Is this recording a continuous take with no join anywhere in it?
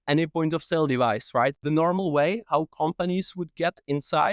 no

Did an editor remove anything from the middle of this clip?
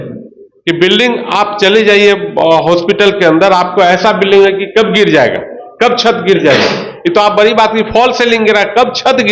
no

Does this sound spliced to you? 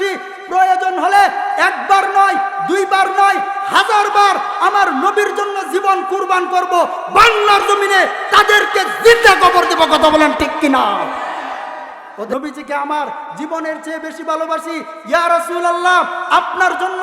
yes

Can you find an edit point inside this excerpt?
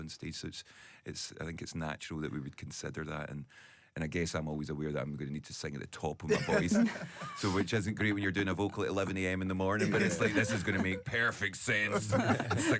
no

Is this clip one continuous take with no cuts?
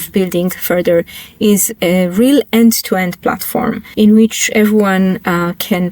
no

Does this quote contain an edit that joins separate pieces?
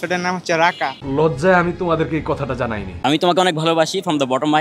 yes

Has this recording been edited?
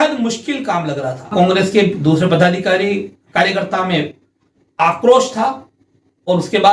yes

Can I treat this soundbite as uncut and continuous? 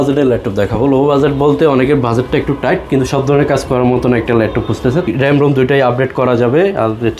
no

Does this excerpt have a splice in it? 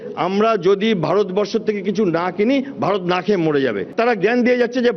yes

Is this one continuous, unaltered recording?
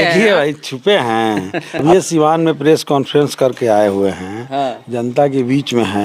yes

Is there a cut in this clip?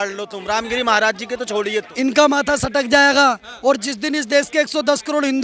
yes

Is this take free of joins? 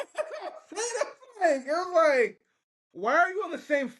yes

